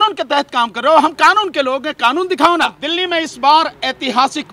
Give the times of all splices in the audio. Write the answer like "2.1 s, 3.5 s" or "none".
2.8 s